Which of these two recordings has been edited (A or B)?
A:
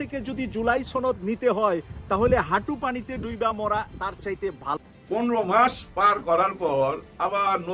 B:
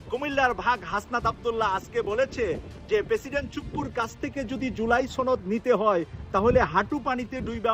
A